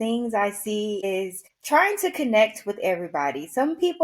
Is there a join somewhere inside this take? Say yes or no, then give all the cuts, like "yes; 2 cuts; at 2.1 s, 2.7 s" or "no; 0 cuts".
yes; 1 cut; at 1.1 s